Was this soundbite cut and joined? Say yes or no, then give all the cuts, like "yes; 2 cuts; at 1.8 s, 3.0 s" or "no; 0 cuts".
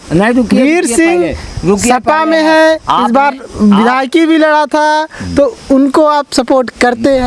no; 0 cuts